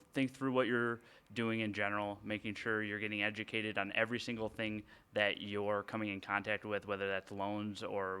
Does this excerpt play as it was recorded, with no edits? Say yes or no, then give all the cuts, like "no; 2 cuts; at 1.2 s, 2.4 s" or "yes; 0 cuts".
yes; 0 cuts